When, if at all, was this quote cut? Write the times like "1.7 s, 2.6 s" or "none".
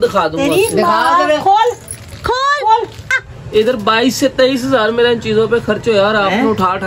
1.9 s, 3.1 s, 6.1 s

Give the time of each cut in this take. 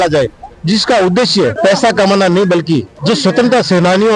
1.6 s, 2.9 s

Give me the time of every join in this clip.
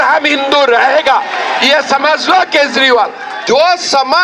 3.3 s

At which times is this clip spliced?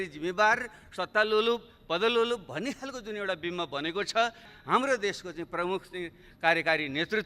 4.5 s

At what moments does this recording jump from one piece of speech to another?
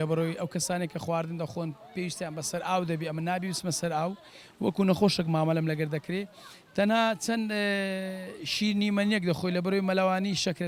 none

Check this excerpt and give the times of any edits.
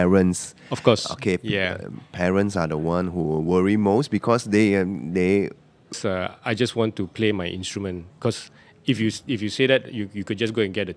6.0 s

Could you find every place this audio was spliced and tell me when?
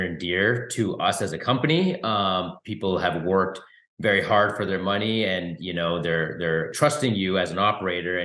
none

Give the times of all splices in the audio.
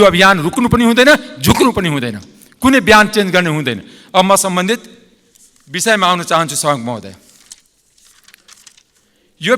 none

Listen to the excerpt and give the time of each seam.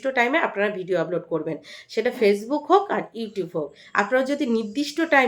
none

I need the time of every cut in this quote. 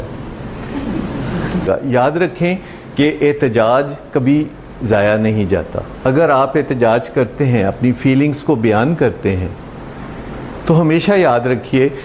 1.6 s

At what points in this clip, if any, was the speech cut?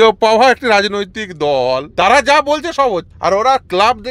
1.9 s, 3.1 s

